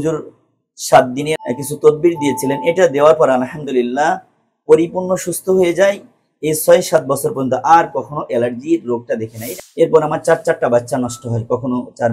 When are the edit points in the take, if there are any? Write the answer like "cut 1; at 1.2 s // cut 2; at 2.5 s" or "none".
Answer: cut 1; at 1.4 s // cut 2; at 9.6 s